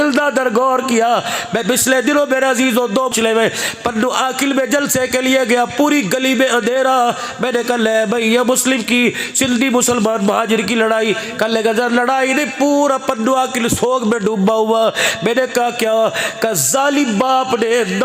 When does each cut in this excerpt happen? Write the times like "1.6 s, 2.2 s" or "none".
3.1 s